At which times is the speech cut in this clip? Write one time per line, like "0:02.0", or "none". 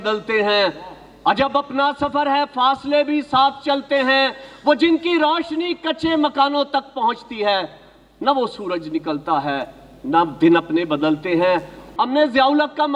0:11.8